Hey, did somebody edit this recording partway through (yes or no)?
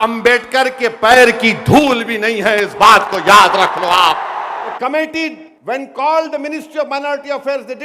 yes